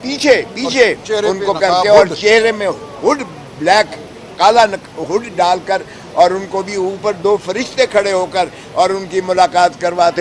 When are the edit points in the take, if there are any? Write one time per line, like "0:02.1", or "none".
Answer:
none